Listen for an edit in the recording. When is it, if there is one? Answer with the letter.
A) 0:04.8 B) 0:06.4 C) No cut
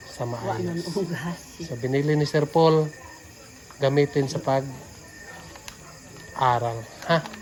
C